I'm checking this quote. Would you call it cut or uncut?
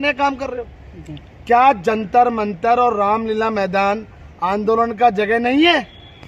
uncut